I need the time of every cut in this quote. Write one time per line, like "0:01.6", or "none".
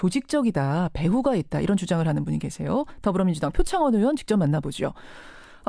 0:02.4